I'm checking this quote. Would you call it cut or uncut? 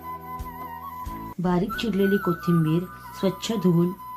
cut